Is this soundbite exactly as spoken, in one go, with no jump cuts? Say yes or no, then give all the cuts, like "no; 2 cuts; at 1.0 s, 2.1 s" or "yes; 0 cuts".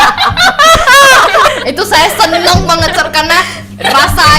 no; 1 cut; at 1.5 s